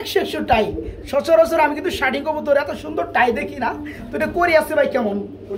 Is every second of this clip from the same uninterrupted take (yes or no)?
yes